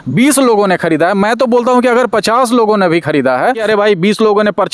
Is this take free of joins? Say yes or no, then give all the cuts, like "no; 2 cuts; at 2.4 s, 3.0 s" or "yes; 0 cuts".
no; 1 cut; at 3.6 s